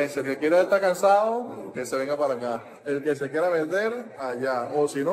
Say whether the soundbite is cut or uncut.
uncut